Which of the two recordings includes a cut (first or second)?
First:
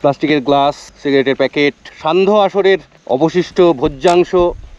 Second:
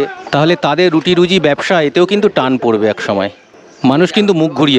first